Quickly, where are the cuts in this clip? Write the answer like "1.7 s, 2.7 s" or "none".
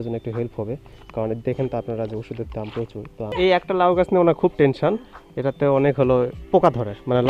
3.3 s